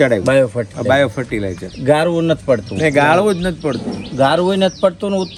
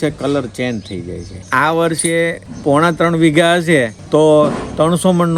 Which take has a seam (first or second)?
second